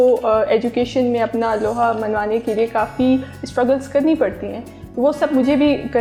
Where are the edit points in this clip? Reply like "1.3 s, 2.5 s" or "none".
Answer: none